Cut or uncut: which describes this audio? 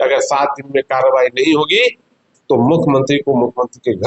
uncut